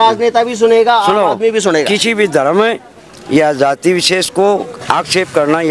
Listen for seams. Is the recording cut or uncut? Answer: uncut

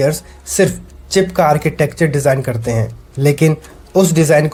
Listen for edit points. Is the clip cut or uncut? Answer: uncut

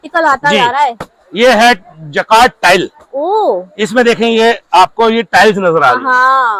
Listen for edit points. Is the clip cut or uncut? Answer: uncut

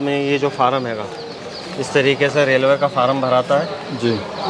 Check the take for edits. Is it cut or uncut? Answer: uncut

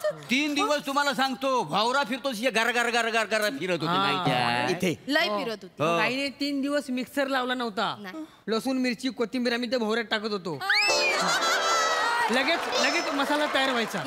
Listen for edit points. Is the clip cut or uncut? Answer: uncut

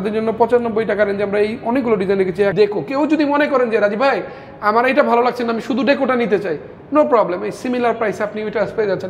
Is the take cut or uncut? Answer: cut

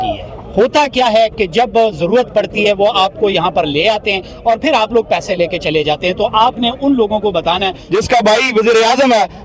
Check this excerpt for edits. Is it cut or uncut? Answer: cut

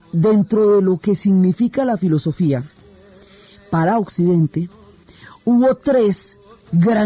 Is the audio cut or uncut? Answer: uncut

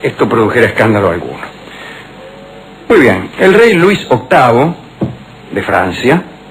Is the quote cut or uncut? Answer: cut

